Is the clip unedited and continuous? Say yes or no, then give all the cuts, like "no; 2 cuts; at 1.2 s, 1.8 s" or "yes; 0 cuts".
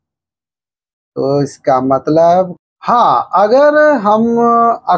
no; 1 cut; at 2.6 s